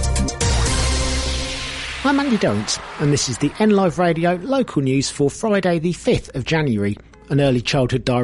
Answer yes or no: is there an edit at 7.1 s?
no